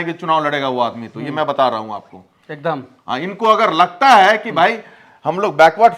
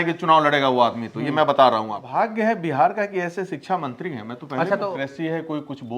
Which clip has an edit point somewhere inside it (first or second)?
second